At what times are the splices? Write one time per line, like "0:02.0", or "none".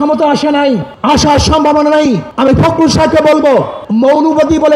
0:00.9
0:02.3
0:03.8